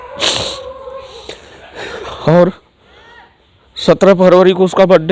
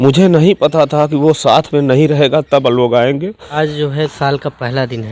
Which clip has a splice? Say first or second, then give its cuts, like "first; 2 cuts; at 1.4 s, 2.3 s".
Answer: second; 1 cut; at 3.4 s